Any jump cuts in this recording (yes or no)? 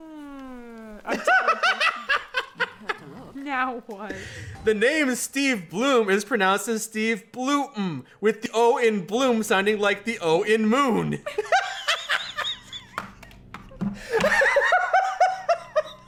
no